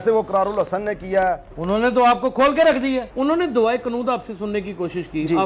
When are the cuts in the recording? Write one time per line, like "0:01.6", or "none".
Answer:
0:01.5
0:03.1